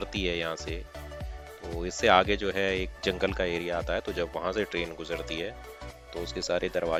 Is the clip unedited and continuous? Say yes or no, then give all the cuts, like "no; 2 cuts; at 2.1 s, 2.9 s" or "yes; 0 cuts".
yes; 0 cuts